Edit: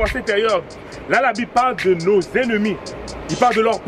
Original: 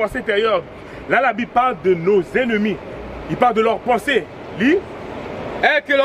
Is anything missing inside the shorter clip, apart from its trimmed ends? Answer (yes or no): no